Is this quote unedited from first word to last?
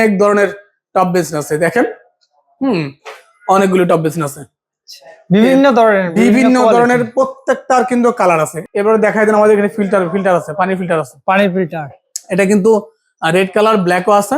no; 1 cut; at 8.6 s

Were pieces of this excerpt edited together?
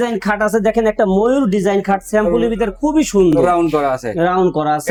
no; 0 cuts

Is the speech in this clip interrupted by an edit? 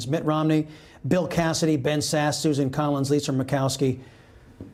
no; 0 cuts

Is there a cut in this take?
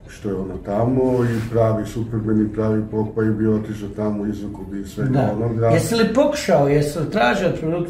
no; 0 cuts

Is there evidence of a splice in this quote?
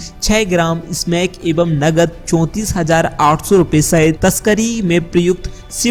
no; 0 cuts

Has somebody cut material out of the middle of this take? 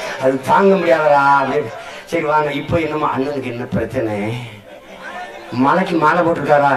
no; 0 cuts

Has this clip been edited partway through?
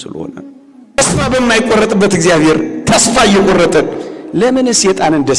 yes; 1 cut; at 1.0 s

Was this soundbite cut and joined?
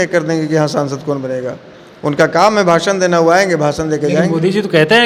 no; 0 cuts

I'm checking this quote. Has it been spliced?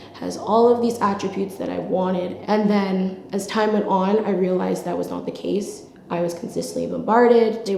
yes; 1 cut; at 2.3 s

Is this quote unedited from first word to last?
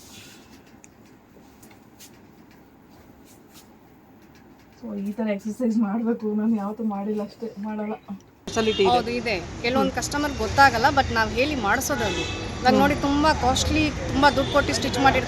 no; 1 cut; at 8.5 s

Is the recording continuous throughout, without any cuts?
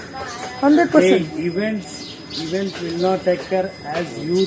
yes; 0 cuts

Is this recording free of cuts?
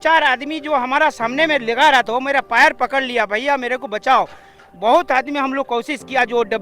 no; 1 cut; at 4.7 s

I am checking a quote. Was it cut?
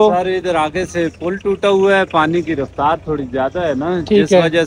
no; 0 cuts

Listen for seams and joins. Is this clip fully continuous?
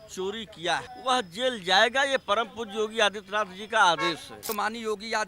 no; 2 cuts; at 0.9 s, 4.5 s

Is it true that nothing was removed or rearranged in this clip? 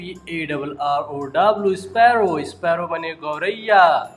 yes; 0 cuts

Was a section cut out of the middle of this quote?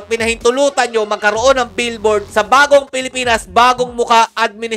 no; 0 cuts

